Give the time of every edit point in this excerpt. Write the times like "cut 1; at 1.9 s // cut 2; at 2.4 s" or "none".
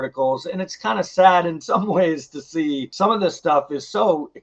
cut 1; at 2.9 s